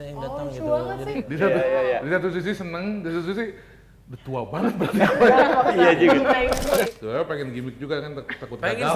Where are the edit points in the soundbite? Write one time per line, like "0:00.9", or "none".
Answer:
0:01.2
0:06.9

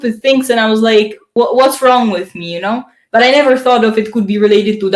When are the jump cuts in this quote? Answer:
0:01.2

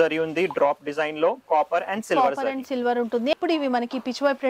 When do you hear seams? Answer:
0:03.3

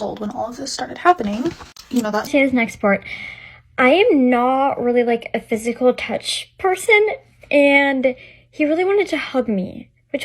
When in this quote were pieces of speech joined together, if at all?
0:02.3

